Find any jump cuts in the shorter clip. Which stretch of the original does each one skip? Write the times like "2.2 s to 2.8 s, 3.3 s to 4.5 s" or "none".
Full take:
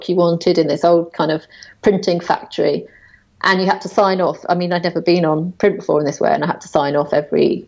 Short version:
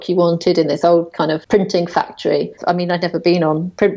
1.4 s to 1.8 s, 2.9 s to 4.4 s